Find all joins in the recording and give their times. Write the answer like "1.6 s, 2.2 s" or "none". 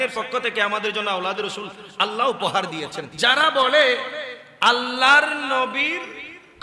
3.0 s